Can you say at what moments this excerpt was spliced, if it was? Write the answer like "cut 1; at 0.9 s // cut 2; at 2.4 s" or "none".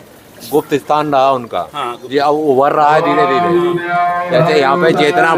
none